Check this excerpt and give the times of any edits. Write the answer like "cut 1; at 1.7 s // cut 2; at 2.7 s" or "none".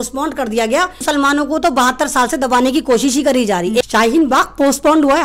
cut 1; at 1.0 s // cut 2; at 3.8 s